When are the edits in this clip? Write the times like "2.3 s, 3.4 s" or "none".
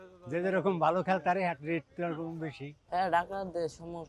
2.8 s